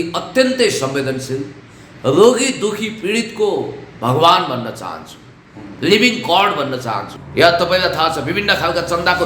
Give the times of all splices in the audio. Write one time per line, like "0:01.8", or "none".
0:07.1